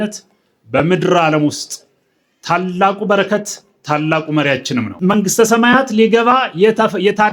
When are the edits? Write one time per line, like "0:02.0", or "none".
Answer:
0:04.9

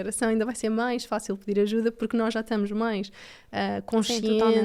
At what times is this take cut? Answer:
none

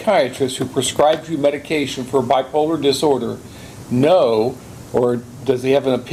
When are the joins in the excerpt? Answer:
none

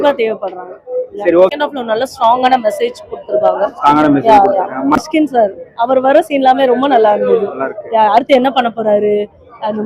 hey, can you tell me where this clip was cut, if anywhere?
0:01.5
0:05.0

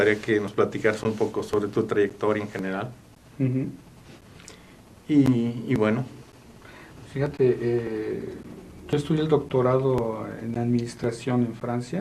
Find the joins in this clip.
0:07.6

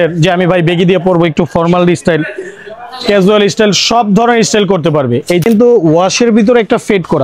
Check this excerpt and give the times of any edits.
0:05.4

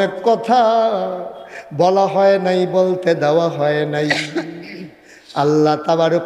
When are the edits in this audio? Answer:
none

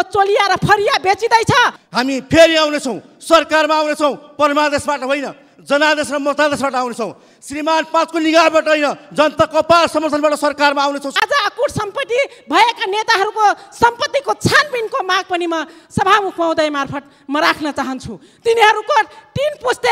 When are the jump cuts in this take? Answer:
0:01.8
0:11.1

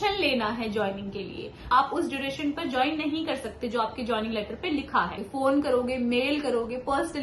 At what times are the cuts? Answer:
0:01.7
0:05.2

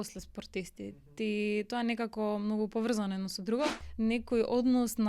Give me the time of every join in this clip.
0:03.8

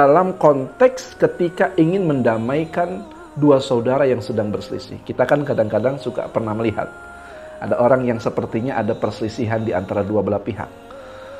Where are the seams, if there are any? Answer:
none

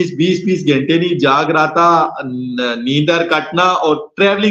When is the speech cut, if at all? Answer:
none

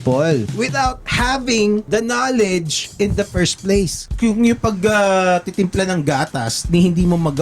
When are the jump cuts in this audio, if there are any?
0:00.7
0:01.8
0:02.8
0:04.1

